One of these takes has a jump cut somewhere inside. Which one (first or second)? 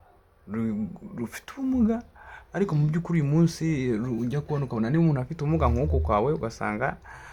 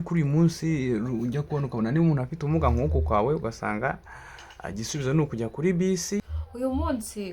second